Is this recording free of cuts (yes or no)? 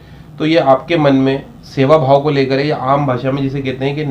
yes